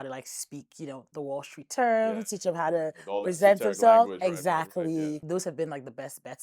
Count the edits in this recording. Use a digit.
1